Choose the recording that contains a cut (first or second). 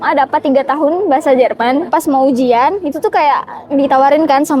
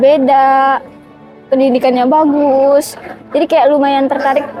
first